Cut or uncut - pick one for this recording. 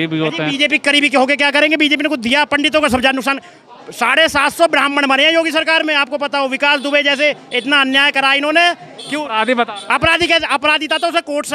uncut